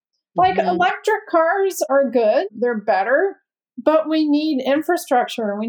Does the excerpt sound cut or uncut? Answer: uncut